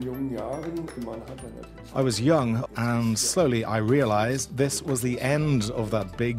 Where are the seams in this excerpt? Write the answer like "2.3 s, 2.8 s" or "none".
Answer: 2.6 s